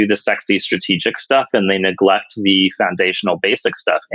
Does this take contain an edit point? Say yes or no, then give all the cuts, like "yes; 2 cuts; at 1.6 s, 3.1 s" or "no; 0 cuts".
no; 0 cuts